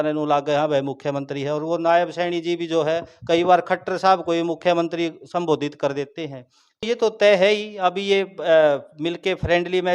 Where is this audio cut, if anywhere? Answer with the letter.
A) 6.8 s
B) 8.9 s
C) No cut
A